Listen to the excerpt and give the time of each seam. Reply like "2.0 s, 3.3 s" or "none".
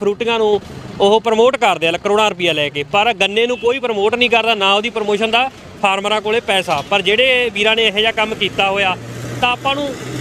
none